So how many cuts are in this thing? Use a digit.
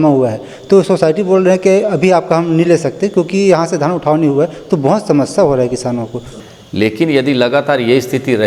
1